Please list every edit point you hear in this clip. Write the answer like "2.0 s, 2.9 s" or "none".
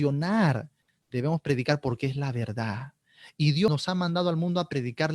3.7 s